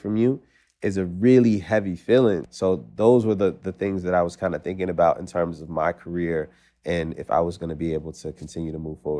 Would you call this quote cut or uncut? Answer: cut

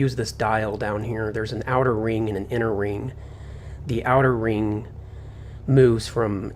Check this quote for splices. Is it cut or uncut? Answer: uncut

